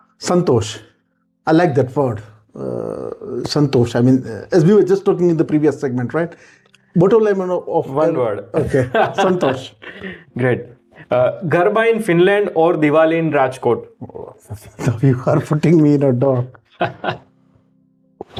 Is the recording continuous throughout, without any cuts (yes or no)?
yes